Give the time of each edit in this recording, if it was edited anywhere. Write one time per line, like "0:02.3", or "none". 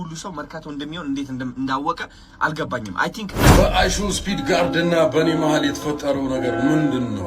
0:03.4